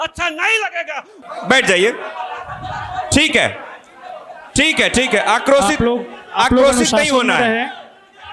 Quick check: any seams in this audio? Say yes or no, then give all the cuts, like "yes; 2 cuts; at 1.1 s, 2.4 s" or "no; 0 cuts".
yes; 1 cut; at 1.0 s